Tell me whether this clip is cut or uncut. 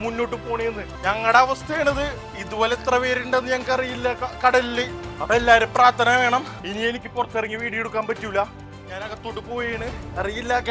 cut